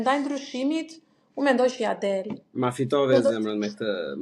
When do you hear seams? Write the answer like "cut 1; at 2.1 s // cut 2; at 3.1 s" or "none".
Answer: none